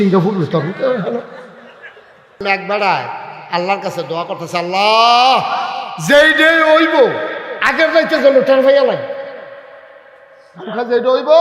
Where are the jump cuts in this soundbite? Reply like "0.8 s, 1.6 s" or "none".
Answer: 2.4 s